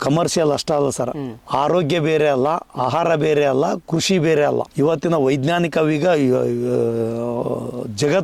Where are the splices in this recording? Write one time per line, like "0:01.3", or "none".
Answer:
none